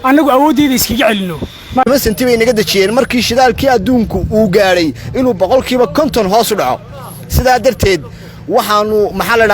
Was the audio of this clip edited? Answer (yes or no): yes